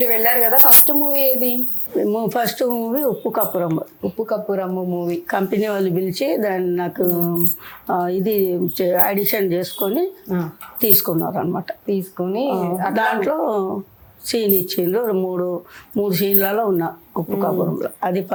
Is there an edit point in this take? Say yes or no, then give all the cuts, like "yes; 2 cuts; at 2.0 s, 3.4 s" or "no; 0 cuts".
no; 0 cuts